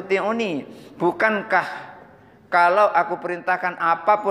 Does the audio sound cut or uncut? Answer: uncut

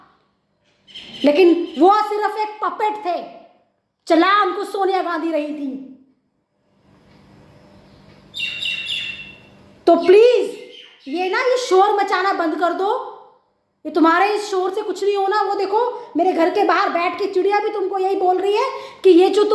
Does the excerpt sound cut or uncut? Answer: uncut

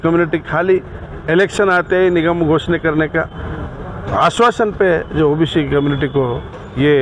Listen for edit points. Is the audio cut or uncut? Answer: uncut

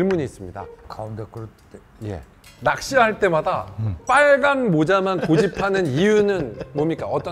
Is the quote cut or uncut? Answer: uncut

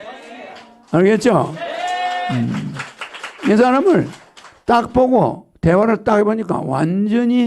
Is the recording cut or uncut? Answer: uncut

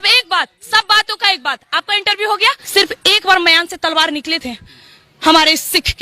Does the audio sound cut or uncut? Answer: cut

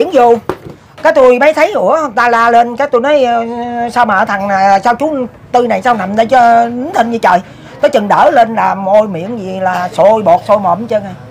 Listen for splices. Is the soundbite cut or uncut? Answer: uncut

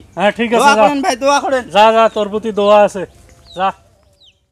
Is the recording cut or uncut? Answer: uncut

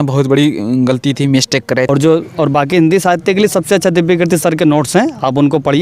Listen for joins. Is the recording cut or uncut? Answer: cut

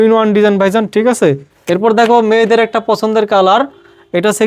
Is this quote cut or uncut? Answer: cut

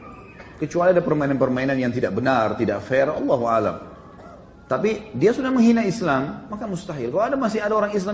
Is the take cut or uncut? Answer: cut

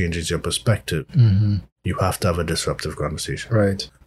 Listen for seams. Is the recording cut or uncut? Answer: uncut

